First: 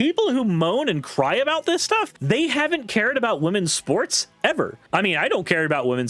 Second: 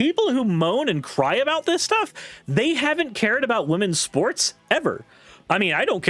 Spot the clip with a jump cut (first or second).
first